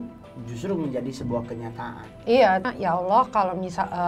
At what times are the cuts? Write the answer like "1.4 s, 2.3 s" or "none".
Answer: 2.7 s